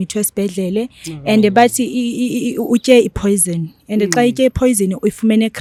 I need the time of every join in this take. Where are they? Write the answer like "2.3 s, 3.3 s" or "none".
none